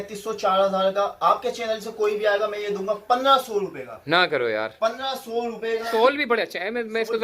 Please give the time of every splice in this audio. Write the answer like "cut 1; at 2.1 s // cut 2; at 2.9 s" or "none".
cut 1; at 5.9 s